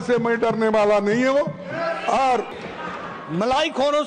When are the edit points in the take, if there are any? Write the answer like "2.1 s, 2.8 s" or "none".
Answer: 2.5 s